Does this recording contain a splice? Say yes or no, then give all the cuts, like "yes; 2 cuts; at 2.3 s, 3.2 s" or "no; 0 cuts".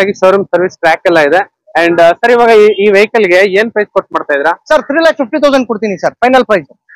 no; 0 cuts